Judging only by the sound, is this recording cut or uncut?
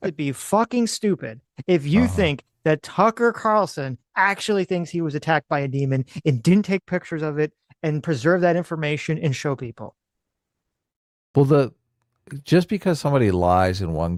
uncut